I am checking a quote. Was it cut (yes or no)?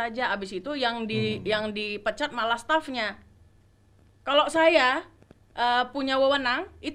no